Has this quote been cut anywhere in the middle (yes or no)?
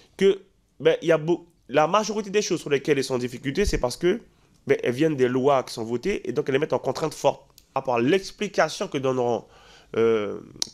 yes